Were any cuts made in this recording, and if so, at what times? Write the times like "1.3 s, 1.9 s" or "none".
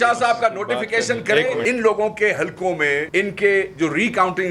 1.6 s, 3.1 s

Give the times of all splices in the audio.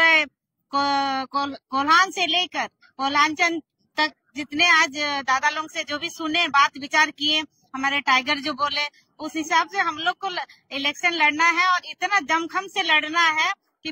none

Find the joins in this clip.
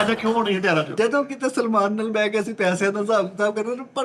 0.9 s

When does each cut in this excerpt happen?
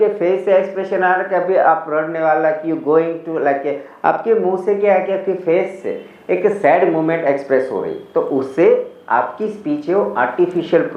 none

